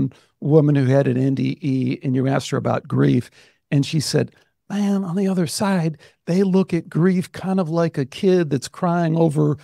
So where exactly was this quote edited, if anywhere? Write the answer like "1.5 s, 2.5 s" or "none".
none

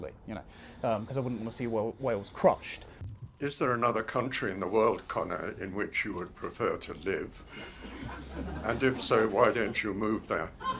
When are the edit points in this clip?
3.0 s

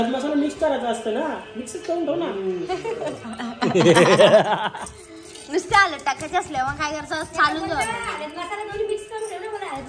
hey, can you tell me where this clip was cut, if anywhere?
none

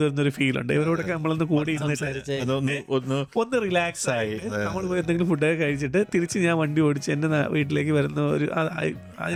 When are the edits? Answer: none

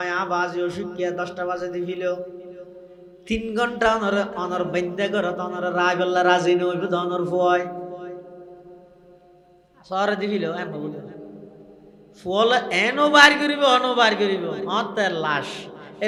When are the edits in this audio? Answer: none

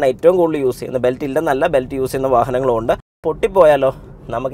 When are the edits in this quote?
3.2 s

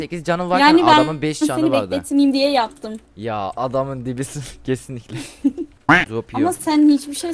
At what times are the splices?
5.9 s

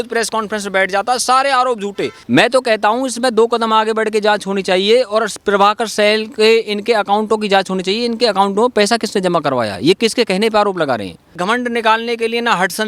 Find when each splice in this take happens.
2.1 s, 11.3 s

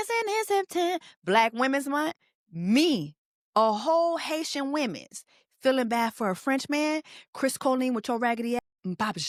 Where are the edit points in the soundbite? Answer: none

